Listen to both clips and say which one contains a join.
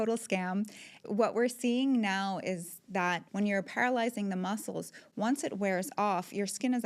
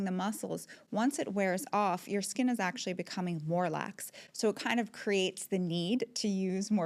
first; 2 cuts; at 1.1 s, 3.2 s

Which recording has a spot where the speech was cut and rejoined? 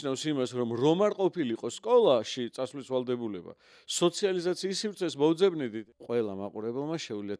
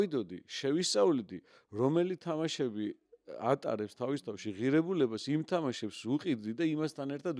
first; 1 cut; at 5.8 s

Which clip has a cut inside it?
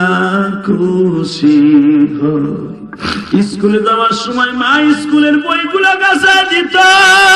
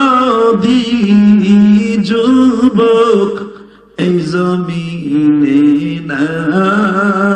first; 1 cut; at 3.2 s

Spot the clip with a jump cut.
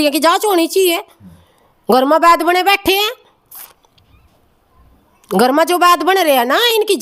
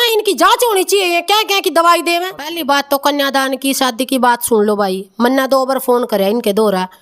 second; 1 cut; at 2.5 s

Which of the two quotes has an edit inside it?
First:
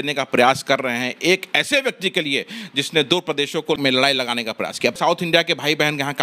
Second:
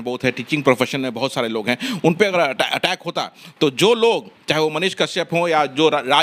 first; 2 cuts; at 3.8 s, 5.0 s

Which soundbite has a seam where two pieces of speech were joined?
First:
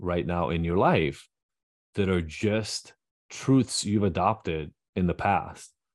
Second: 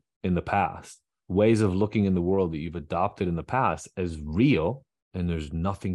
second; 1 cut; at 4.9 s

